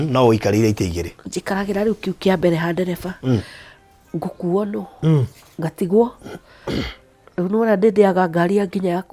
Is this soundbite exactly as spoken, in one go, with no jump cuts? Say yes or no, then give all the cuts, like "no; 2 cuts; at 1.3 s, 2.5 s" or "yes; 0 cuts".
yes; 0 cuts